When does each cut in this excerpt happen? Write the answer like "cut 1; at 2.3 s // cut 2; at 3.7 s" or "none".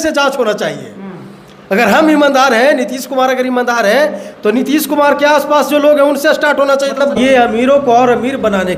cut 1; at 7.2 s